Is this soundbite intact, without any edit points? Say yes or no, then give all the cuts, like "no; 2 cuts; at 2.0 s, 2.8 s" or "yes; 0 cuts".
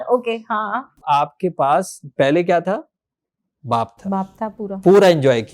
no; 1 cut; at 1.0 s